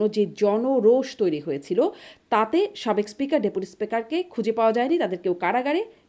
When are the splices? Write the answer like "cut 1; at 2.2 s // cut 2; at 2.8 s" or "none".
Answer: none